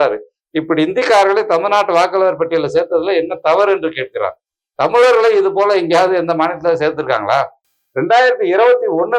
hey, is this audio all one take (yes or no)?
no